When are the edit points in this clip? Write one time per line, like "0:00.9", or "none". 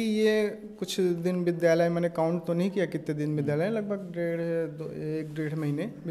none